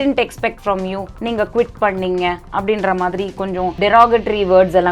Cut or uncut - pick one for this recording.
cut